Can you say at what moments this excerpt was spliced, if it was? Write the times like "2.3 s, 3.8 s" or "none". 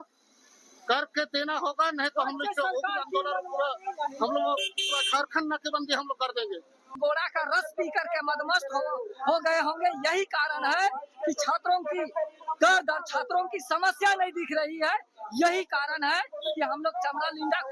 7.0 s